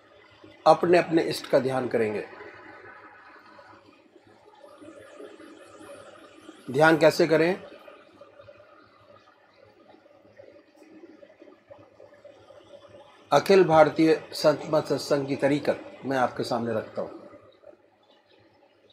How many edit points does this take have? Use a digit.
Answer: 1